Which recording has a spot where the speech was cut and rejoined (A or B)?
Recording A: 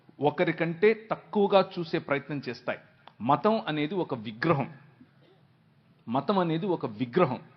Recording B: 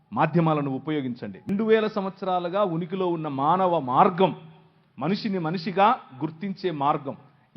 B